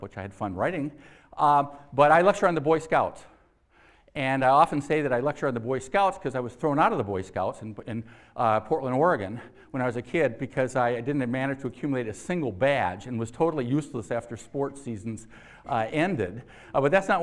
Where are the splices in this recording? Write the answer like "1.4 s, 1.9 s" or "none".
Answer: 3.7 s